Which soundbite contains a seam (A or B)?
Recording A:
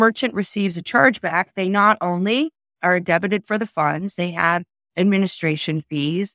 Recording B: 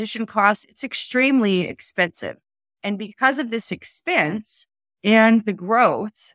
B